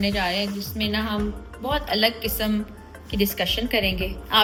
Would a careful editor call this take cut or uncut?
uncut